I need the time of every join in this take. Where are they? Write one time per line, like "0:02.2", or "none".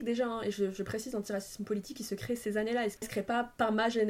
0:03.1